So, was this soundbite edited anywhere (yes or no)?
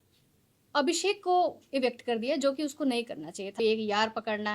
yes